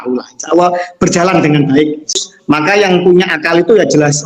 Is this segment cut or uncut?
cut